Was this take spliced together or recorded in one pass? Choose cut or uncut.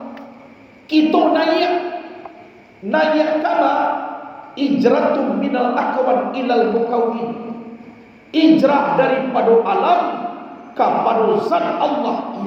uncut